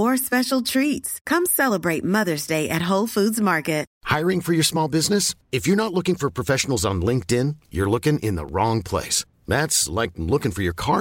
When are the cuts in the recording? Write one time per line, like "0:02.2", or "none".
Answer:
0:04.0